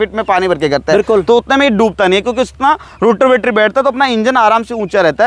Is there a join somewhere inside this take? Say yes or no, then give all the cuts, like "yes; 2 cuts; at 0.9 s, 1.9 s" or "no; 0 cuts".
no; 0 cuts